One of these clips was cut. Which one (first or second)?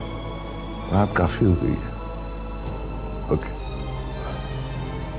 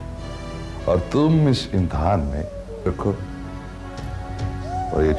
second